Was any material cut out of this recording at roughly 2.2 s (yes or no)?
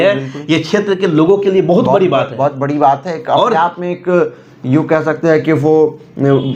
no